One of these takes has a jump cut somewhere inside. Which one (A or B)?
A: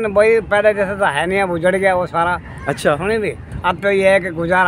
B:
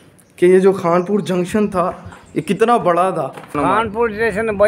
B